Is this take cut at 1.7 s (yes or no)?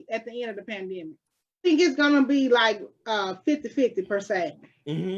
yes